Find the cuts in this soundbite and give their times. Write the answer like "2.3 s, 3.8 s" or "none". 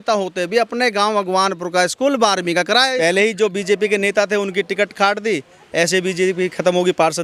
3.0 s